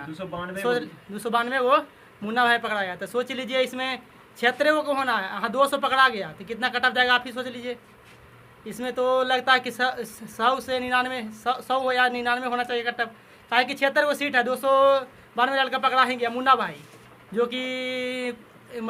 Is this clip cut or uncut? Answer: uncut